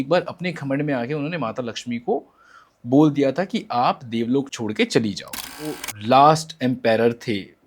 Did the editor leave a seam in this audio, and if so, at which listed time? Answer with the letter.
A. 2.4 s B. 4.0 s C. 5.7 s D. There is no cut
C